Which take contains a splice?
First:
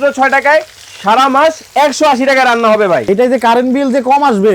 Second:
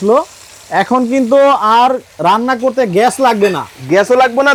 first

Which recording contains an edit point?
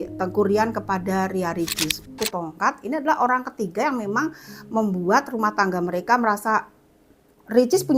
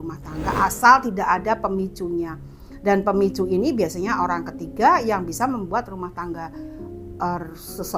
first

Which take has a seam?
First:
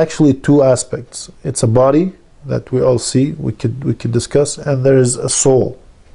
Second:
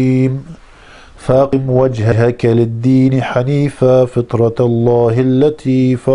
second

